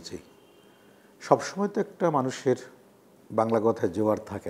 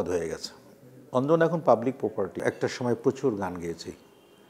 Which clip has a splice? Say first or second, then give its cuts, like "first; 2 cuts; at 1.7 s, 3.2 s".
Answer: second; 1 cut; at 2.4 s